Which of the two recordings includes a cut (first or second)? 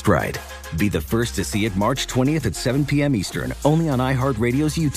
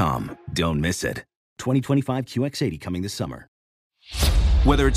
second